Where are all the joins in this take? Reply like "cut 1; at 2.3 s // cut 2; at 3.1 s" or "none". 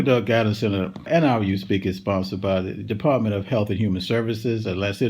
cut 1; at 1.1 s